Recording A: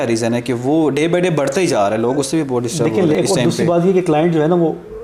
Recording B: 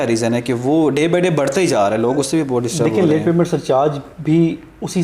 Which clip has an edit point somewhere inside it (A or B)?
A